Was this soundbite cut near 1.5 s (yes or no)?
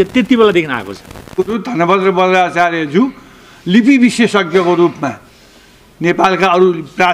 yes